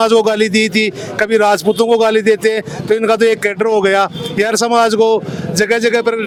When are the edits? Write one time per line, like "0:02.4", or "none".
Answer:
none

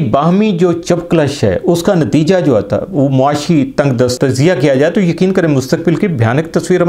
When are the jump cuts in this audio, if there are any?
0:04.2

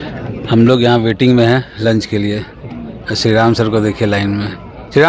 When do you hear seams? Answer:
none

